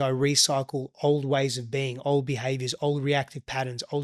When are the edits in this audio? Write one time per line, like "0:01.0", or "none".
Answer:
none